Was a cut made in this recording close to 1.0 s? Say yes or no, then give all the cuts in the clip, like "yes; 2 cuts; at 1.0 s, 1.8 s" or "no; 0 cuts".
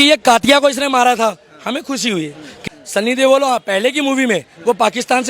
no; 1 cut; at 2.6 s